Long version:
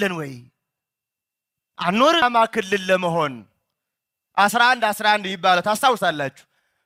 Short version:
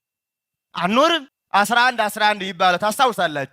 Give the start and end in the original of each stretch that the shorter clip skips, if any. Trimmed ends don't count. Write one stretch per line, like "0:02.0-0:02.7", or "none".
0:02.2-0:04.0